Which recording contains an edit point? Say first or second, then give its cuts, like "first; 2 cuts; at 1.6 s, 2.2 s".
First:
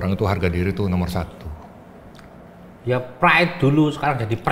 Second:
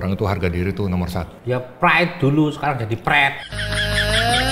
second; 1 cut; at 1.3 s